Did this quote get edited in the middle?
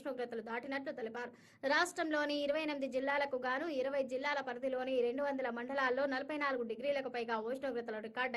yes; 1 cut; at 7.0 s

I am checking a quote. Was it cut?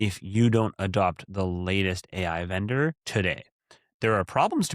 yes; 1 cut; at 3.0 s

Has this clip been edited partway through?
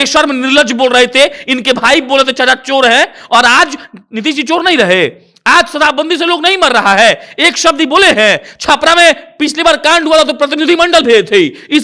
no; 0 cuts

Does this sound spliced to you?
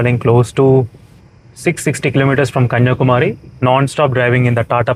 no; 0 cuts

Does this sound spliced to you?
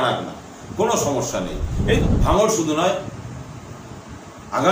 yes; 1 cut; at 2.0 s

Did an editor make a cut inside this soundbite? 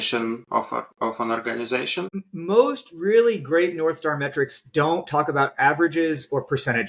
yes; 1 cut; at 2.2 s

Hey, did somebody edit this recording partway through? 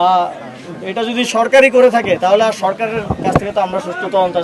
no; 0 cuts

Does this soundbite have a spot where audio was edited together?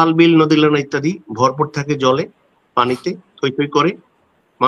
no; 0 cuts

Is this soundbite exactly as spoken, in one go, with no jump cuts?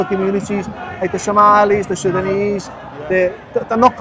yes; 0 cuts

